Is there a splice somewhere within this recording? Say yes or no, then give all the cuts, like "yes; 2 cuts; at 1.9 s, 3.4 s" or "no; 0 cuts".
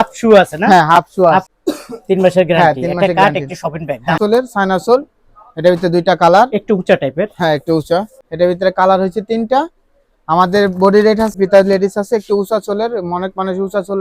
yes; 4 cuts; at 1.5 s, 4.2 s, 8.2 s, 11.4 s